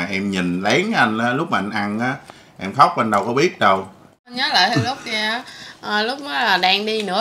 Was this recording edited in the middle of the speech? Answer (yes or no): yes